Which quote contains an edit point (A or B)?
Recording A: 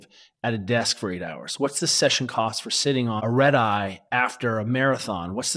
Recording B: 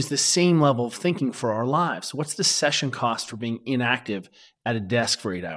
A